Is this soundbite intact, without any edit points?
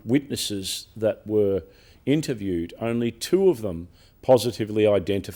yes; 0 cuts

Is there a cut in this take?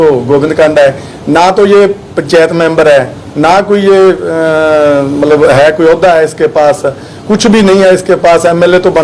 no; 0 cuts

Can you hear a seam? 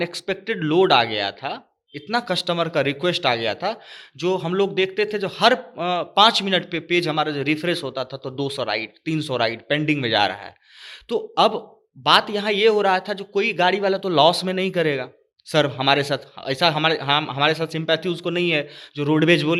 no; 0 cuts

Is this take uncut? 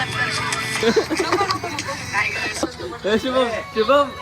no; 2 cuts; at 0.8 s, 2.6 s

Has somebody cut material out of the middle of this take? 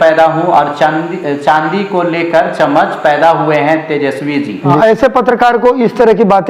yes; 1 cut; at 4.7 s

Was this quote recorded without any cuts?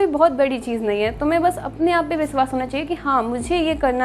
yes; 0 cuts

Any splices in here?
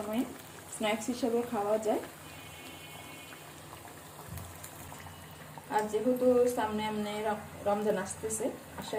no; 0 cuts

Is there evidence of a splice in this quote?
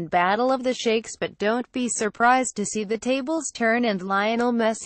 no; 0 cuts

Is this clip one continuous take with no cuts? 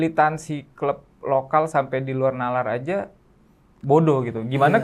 yes; 0 cuts

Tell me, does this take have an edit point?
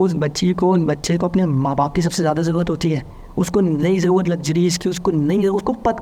no; 0 cuts

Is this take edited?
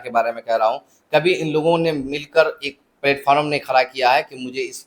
no; 0 cuts

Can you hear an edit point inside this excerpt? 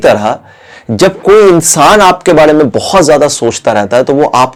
no; 0 cuts

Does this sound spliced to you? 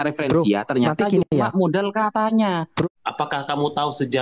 yes; 1 cut; at 2.8 s

